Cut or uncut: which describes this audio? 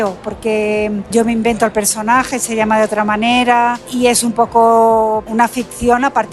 cut